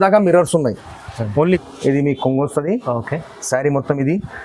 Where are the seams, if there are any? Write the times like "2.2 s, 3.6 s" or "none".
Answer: 1.6 s